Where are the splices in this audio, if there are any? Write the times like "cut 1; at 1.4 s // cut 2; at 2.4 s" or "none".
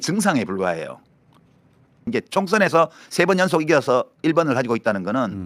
cut 1; at 2.0 s